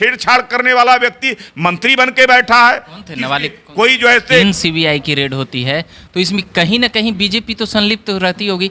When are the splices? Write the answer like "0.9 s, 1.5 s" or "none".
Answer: 4.4 s

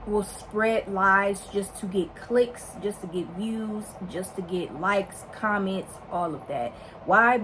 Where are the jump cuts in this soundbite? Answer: none

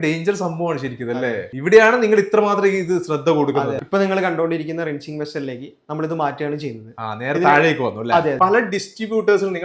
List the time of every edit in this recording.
1.5 s, 3.8 s, 8.4 s

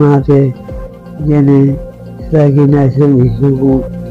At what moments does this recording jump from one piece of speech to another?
none

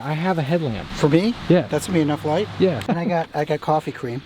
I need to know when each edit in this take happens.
0.9 s, 1.7 s, 2.8 s

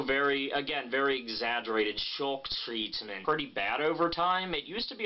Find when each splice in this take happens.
none

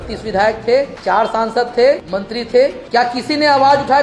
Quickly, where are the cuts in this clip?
1.0 s, 2.5 s

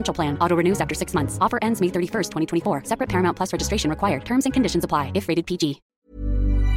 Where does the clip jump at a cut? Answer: 5.9 s

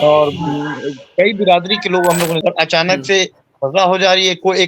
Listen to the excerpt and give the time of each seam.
2.4 s

